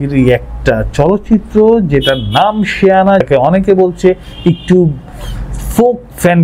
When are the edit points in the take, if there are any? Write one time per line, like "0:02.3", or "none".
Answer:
0:03.2